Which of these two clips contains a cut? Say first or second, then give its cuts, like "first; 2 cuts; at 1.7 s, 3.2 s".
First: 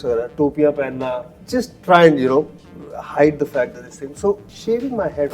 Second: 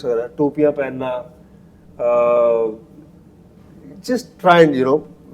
first; 2 cuts; at 1.3 s, 4.5 s